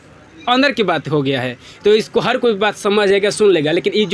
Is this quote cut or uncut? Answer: uncut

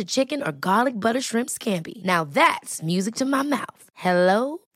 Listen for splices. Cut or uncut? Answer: uncut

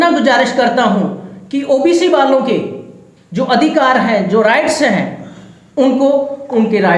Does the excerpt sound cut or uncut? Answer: uncut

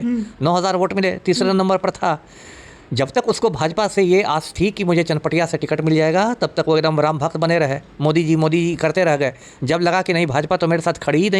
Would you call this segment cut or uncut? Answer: uncut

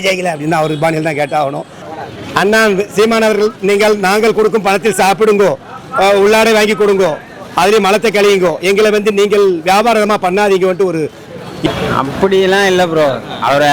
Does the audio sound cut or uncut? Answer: cut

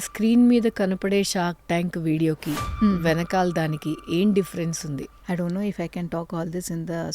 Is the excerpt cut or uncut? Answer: cut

